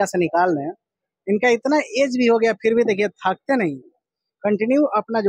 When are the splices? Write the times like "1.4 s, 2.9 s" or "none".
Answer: none